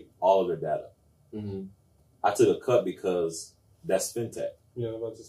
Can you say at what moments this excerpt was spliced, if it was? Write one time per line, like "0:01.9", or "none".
none